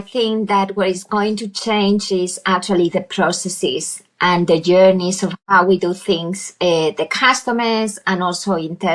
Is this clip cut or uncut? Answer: uncut